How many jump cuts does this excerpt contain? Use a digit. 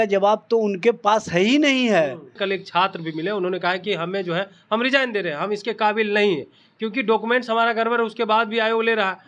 1